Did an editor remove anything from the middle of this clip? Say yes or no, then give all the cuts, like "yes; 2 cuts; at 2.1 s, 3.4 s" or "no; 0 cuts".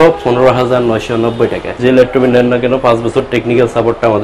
yes; 1 cut; at 1.8 s